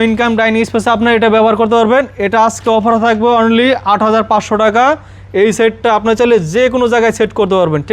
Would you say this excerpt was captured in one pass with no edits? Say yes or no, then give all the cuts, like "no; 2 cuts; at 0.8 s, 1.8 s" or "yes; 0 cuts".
yes; 0 cuts